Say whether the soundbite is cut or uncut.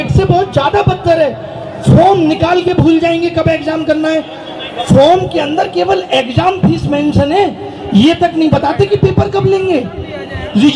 uncut